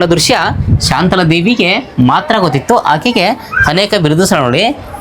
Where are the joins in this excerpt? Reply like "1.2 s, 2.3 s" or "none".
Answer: none